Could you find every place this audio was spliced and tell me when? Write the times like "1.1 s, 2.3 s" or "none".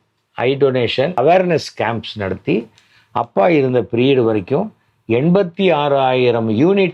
1.2 s